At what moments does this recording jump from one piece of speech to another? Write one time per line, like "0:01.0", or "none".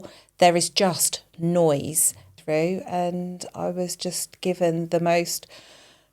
0:02.3